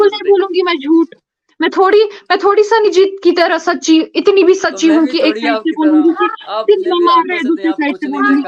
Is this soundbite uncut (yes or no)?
yes